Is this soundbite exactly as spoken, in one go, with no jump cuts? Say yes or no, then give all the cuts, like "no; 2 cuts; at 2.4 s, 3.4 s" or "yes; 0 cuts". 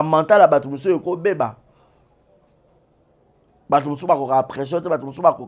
yes; 0 cuts